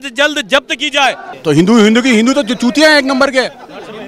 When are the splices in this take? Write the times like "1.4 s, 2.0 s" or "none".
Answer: 1.3 s